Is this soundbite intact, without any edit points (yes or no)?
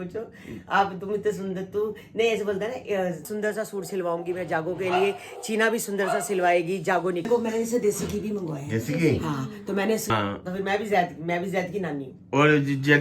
no